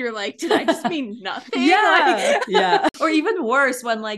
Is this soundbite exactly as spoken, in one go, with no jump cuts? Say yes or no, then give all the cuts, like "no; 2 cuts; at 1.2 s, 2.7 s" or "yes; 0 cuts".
no; 1 cut; at 2.9 s